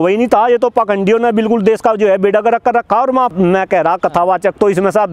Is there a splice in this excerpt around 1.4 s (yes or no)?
no